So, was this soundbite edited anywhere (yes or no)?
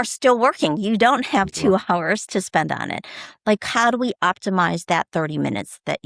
no